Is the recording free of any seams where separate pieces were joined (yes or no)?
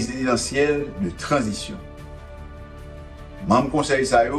no